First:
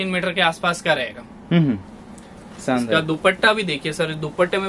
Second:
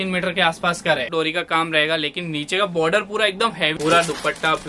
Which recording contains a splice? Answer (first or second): second